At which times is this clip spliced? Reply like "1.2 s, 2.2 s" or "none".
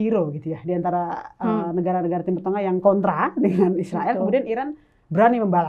none